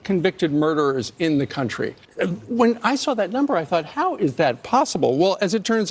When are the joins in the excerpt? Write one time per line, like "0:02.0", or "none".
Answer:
0:02.0